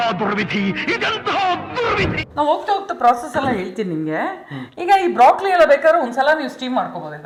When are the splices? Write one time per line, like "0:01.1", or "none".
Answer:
none